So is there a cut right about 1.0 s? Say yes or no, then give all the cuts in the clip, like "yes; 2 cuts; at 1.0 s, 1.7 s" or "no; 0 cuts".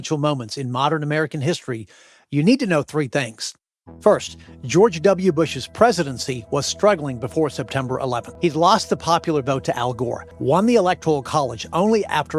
no; 2 cuts; at 8.3 s, 10.3 s